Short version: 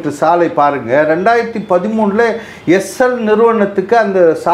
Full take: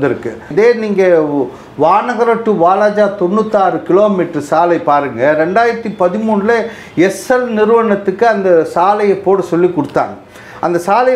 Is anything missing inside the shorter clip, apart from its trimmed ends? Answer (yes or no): no